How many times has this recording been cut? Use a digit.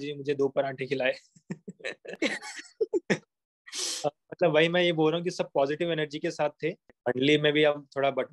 1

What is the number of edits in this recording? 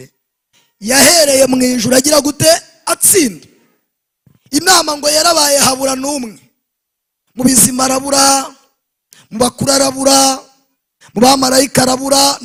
0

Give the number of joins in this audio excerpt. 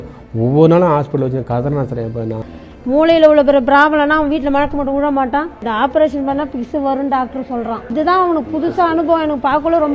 3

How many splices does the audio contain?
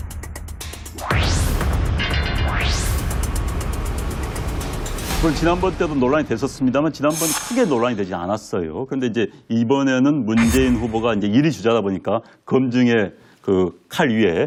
0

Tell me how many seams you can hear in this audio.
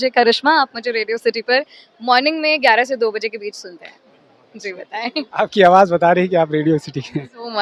0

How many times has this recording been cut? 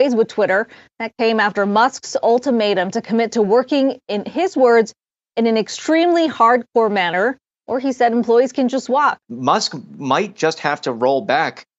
1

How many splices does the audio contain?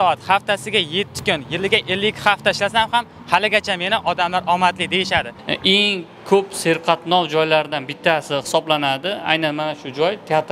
1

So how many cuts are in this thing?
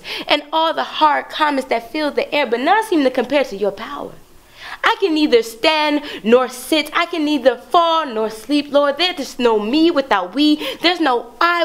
0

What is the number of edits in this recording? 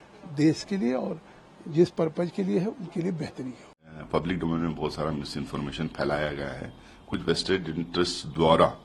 1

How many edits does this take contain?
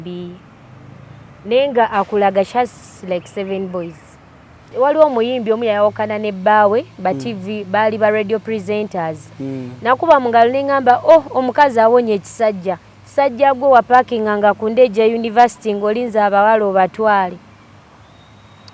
1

